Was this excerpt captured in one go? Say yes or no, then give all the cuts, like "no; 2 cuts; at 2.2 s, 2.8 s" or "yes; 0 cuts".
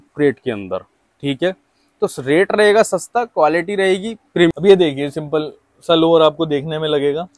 no; 1 cut; at 4.5 s